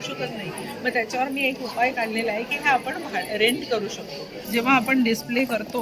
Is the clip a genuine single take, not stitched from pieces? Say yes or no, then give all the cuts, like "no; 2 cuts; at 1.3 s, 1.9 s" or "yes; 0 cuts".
no; 1 cut; at 4.4 s